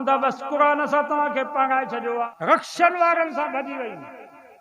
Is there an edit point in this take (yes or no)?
yes